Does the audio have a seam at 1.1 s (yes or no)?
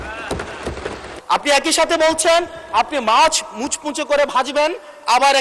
yes